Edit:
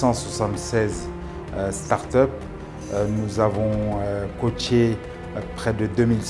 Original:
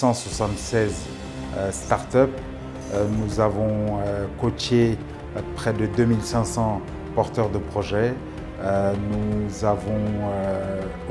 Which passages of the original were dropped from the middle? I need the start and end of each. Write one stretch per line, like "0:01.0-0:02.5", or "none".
none